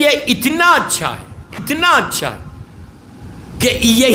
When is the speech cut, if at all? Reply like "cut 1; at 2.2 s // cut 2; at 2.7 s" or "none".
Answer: none